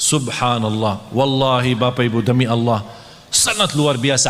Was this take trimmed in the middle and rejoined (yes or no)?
no